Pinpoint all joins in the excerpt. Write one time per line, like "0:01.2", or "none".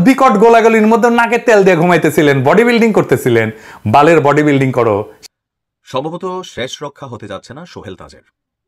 0:05.2